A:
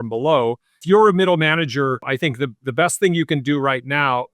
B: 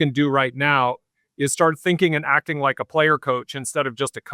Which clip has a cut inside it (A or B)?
A